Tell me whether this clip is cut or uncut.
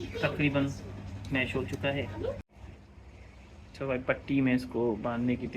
cut